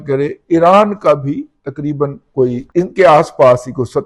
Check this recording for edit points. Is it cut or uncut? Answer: cut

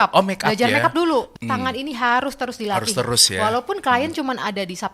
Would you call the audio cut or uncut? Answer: cut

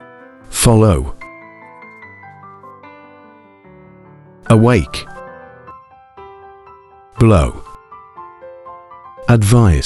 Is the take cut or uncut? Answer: uncut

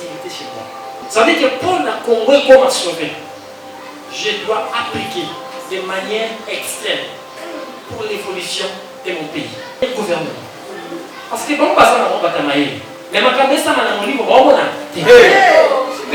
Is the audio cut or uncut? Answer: cut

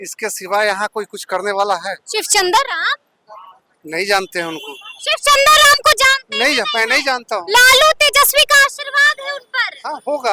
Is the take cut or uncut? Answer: uncut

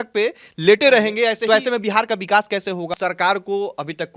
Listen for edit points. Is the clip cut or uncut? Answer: cut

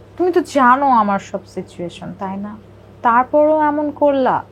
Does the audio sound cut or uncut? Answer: uncut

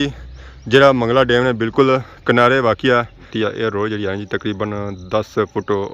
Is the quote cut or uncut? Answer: cut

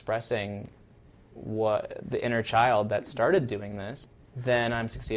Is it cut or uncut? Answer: cut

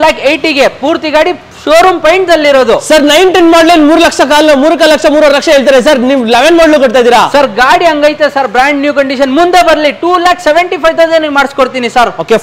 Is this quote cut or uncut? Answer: uncut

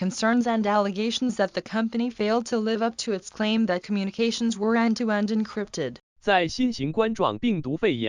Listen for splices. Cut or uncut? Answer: cut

